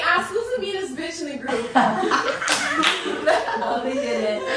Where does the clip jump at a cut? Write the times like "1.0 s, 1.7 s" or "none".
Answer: none